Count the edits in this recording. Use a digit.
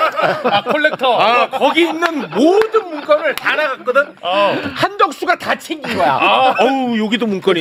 0